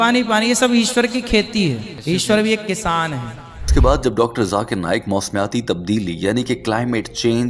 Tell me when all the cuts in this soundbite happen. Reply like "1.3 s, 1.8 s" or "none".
1.9 s, 3.7 s